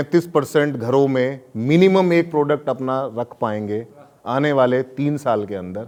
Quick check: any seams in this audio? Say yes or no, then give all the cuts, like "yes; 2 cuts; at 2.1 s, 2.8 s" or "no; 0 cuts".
no; 0 cuts